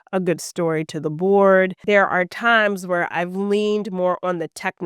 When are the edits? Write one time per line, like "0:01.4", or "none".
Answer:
0:01.8